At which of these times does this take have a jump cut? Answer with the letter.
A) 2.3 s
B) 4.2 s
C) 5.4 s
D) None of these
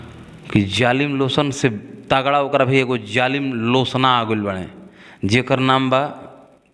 D